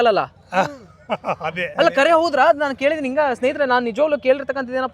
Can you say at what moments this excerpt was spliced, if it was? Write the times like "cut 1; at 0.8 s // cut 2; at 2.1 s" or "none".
none